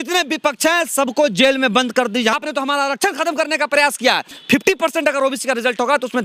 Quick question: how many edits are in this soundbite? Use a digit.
2